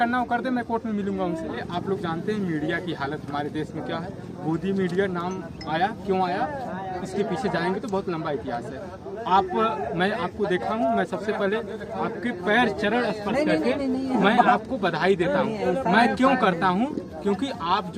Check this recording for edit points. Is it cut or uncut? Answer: cut